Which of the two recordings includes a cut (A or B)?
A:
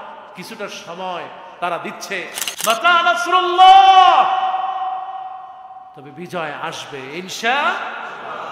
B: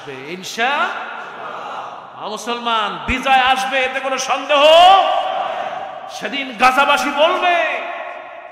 A